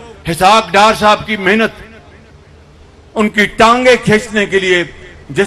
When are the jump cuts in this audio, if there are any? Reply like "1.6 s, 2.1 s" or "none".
none